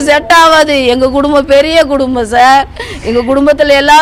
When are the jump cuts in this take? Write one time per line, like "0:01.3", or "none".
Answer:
none